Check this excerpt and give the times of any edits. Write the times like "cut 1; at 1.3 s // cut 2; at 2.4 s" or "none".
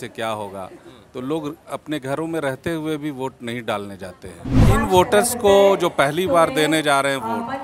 cut 1; at 4.6 s